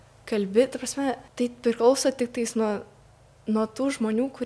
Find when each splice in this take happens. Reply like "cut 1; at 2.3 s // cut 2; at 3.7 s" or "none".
cut 1; at 1.3 s